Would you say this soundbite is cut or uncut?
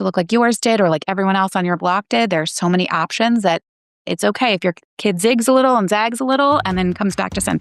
uncut